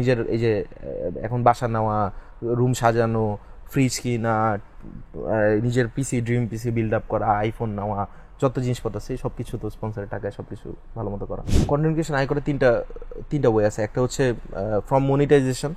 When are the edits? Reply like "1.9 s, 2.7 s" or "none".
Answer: 11.5 s